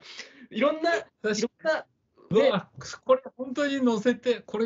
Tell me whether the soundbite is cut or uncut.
uncut